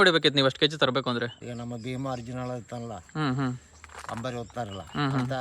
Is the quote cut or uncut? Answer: cut